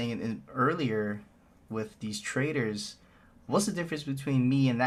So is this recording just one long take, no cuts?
yes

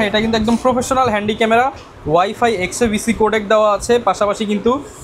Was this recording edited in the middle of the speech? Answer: no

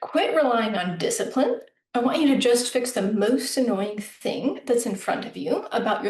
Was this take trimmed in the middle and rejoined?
no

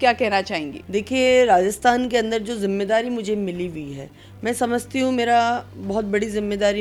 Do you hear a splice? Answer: no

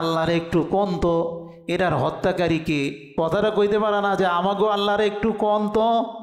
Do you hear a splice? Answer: no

